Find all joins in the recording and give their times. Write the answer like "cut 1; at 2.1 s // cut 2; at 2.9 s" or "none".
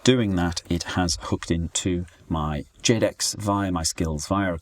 cut 1; at 2.4 s